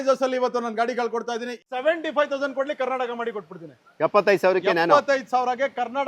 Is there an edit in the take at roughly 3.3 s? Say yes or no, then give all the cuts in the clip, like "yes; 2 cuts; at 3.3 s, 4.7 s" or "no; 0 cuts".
no; 1 cut; at 1.5 s